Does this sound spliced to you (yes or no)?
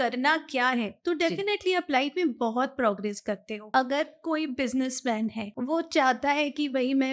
yes